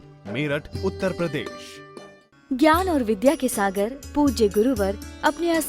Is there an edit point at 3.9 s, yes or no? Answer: no